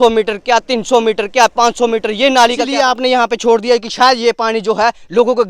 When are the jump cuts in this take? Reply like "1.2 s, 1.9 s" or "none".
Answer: 2.7 s